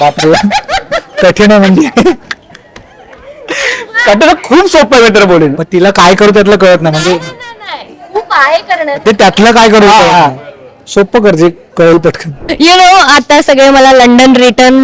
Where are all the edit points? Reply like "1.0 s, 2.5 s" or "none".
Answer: 12.4 s